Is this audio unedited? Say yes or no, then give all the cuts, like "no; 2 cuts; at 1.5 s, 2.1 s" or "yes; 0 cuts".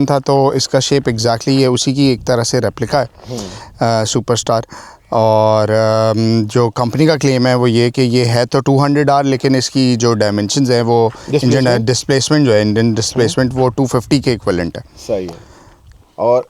yes; 0 cuts